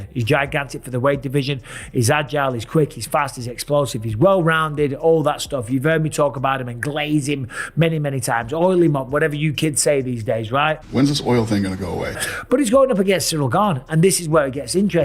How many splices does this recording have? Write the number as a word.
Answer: zero